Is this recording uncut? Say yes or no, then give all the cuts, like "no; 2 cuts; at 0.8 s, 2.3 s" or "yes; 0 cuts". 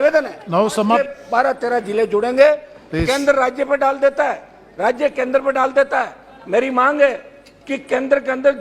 no; 1 cut; at 1.1 s